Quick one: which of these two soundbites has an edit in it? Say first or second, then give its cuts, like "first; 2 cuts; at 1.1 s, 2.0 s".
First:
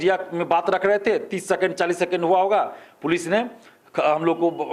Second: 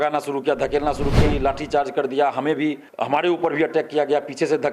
second; 2 cuts; at 1.2 s, 2.9 s